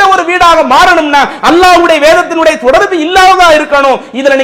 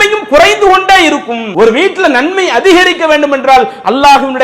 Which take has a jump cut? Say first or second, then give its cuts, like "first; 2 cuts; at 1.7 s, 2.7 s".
second; 1 cut; at 1.4 s